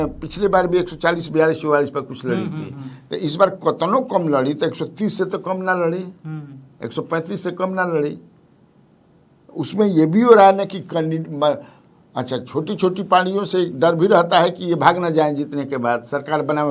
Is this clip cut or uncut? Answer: uncut